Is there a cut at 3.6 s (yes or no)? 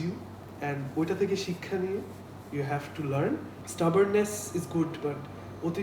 yes